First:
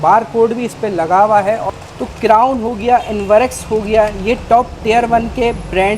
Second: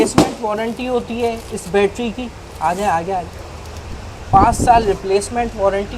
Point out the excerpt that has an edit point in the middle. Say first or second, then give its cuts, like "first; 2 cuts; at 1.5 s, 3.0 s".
first; 1 cut; at 1.6 s